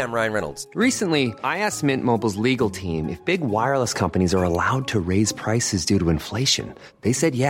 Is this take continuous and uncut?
yes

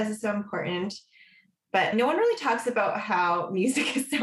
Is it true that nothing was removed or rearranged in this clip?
yes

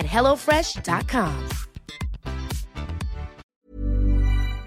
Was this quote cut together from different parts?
yes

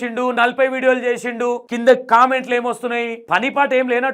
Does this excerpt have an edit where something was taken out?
yes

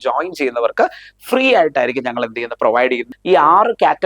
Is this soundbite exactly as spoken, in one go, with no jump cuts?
no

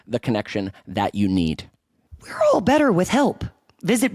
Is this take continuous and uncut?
yes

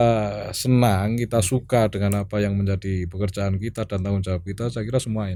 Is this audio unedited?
yes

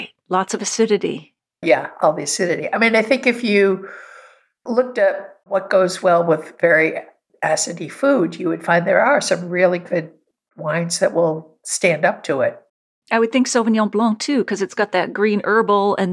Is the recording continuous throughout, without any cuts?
yes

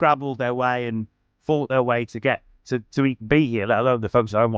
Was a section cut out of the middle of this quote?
no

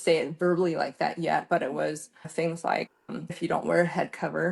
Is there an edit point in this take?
yes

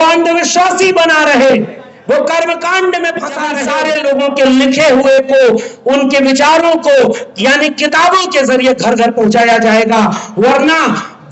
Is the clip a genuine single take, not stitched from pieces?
no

